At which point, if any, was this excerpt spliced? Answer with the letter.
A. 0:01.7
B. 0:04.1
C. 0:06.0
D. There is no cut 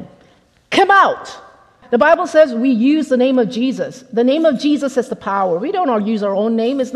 A